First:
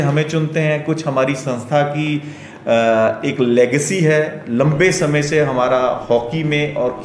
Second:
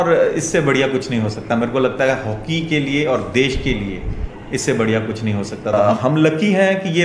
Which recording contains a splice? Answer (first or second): second